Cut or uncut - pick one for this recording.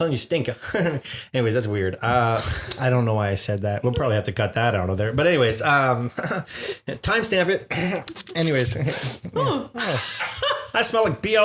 uncut